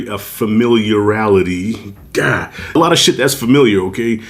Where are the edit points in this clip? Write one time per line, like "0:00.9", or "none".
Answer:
0:02.7